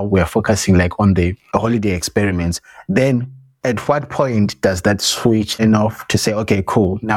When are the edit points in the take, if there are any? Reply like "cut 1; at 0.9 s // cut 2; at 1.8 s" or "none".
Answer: cut 1; at 5.5 s